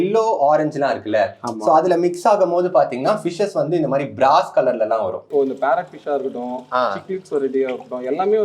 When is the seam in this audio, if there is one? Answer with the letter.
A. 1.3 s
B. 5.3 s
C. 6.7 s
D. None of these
B